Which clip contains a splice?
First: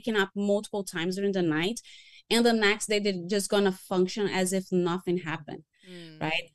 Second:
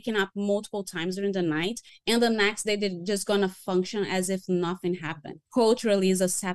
second; 2 cuts; at 1.9 s, 5.3 s

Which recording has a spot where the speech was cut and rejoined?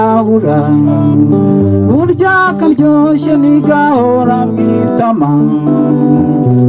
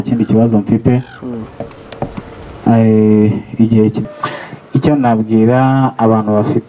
second; 1 cut; at 4.0 s

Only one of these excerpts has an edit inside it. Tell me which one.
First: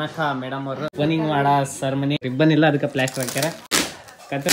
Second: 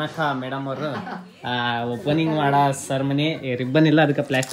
first; 3 cuts; at 0.9 s, 2.2 s, 3.5 s

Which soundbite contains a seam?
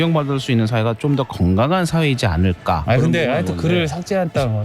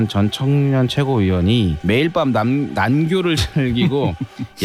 first; 1 cut; at 2.8 s

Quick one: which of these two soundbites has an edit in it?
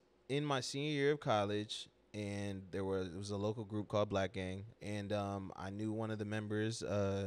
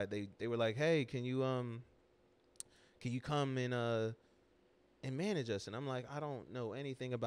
first; 1 cut; at 4.7 s

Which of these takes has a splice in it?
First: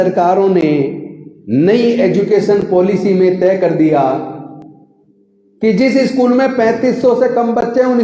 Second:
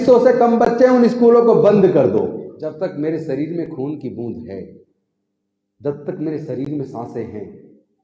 second; 1 cut; at 2.5 s

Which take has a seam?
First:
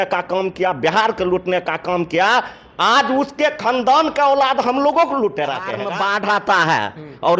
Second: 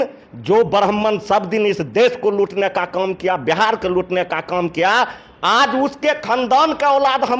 first; 1 cut; at 5.8 s

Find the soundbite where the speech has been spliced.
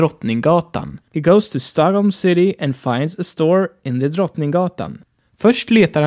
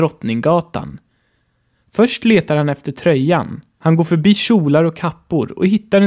second; 2 cuts; at 1.2 s, 3.6 s

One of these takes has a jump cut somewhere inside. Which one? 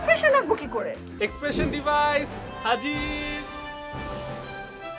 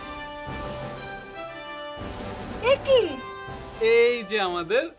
first; 1 cut; at 1.1 s

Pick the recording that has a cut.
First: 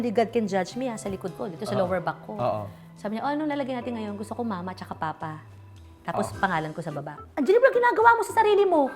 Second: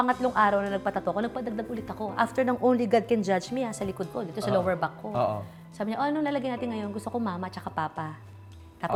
first; 1 cut; at 7.2 s

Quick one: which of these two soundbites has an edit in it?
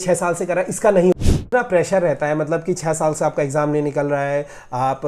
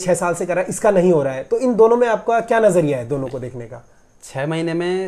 first; 1 cut; at 1.1 s

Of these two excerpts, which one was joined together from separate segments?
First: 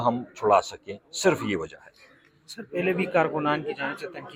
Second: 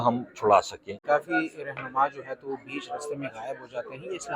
second; 1 cut; at 0.9 s

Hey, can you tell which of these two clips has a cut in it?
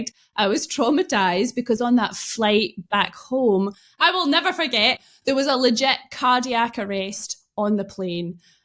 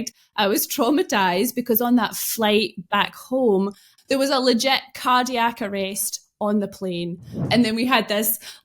second; 2 cuts; at 3.9 s, 7.4 s

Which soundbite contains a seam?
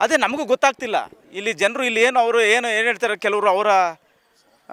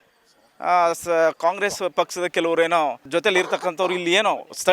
second; 1 cut; at 3.1 s

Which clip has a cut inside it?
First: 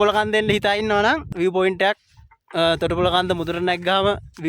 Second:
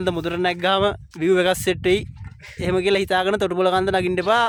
first; 1 cut; at 1.3 s

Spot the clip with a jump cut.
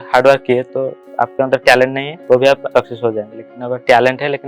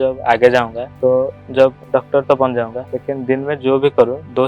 first; 3 cuts; at 1.0 s, 2.1 s, 2.7 s

